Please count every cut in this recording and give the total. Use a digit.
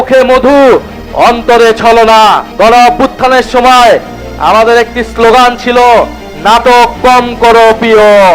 1